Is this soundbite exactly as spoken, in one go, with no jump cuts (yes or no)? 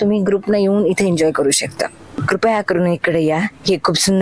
no